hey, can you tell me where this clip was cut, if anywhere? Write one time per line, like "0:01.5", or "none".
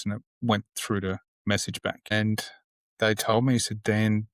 0:02.1